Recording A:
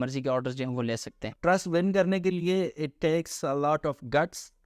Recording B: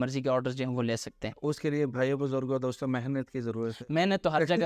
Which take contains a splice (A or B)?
A